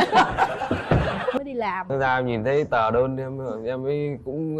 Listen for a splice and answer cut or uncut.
cut